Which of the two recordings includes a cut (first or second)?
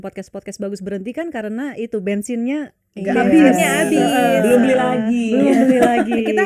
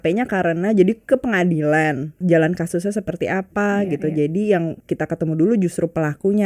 second